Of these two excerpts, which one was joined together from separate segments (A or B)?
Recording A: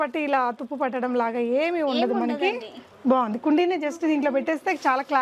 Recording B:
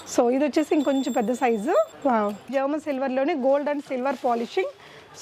B